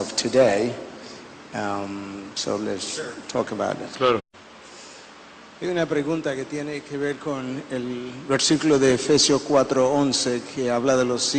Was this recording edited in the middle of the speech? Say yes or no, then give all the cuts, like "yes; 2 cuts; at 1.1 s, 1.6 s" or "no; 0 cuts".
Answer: no; 0 cuts